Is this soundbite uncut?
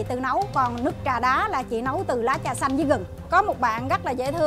no; 1 cut; at 3.1 s

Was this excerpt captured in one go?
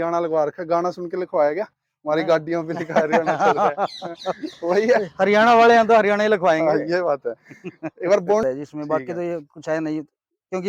no; 1 cut; at 8.4 s

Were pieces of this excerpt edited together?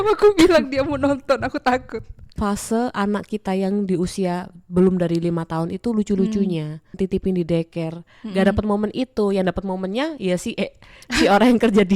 yes; 2 cuts; at 2.4 s, 7.0 s

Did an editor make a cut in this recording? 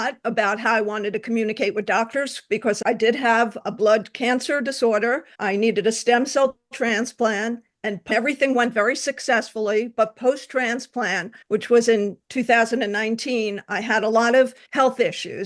no; 0 cuts

